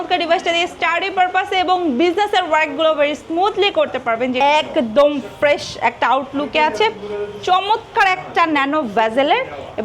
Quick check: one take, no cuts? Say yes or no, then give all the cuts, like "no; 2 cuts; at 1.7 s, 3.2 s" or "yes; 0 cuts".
no; 1 cut; at 4.4 s